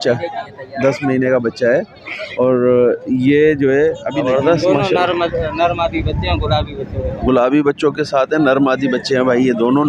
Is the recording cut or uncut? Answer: cut